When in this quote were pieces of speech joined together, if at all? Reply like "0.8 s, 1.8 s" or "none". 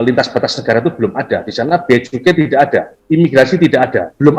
none

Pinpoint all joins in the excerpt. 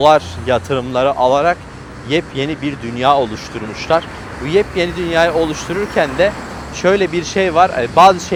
none

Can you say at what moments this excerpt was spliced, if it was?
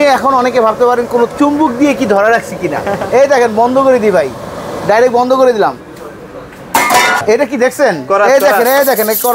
7.2 s

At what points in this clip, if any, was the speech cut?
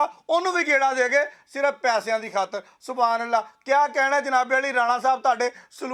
none

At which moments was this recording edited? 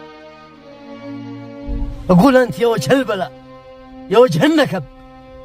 none

